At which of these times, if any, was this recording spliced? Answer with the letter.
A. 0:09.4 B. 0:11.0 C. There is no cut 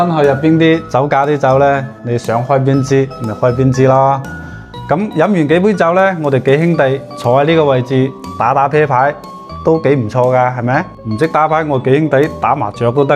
B